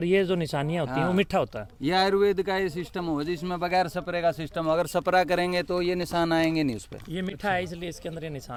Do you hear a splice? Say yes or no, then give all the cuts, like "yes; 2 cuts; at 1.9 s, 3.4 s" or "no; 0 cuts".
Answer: no; 0 cuts